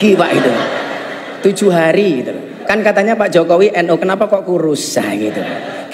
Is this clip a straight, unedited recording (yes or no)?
no